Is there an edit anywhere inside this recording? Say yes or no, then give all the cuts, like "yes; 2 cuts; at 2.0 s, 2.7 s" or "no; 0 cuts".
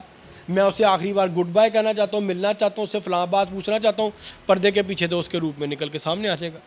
no; 0 cuts